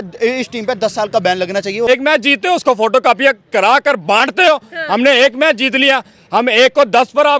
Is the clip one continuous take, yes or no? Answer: no